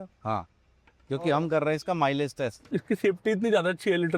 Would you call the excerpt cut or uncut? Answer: cut